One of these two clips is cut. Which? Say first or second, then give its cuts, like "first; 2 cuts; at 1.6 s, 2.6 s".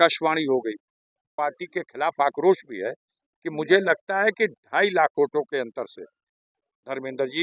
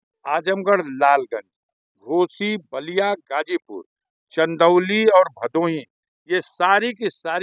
first; 1 cut; at 1.3 s